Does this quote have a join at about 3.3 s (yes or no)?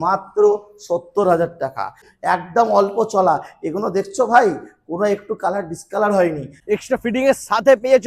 no